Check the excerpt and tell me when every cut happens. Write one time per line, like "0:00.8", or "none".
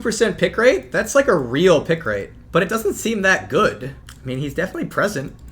0:02.4
0:04.1